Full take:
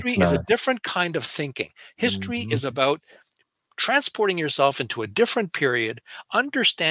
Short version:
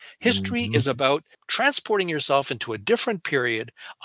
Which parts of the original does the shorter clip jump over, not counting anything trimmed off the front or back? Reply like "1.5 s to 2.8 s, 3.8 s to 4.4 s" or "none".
3.2 s to 3.7 s